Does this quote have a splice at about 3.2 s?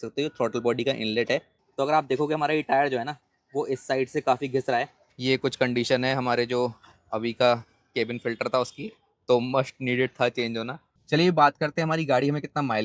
no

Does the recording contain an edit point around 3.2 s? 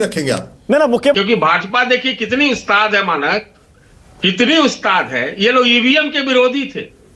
no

